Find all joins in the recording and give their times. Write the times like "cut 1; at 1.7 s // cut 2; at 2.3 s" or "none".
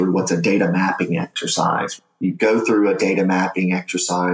cut 1; at 2.0 s

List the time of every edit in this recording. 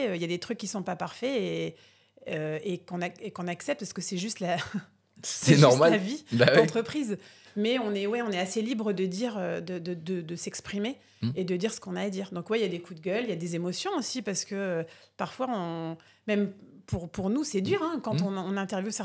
none

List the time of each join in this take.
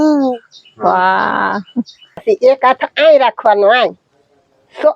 cut 1; at 2.2 s

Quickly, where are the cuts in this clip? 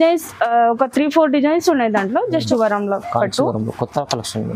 cut 1; at 2.3 s

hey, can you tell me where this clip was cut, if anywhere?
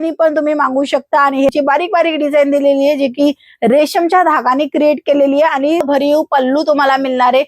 cut 1; at 1.5 s // cut 2; at 5.8 s

